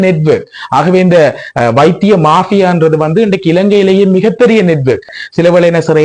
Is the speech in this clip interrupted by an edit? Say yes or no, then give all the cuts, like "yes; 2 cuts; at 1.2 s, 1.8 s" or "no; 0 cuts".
yes; 1 cut; at 5.1 s